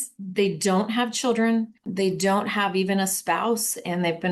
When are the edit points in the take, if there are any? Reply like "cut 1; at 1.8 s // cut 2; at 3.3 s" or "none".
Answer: cut 1; at 1.8 s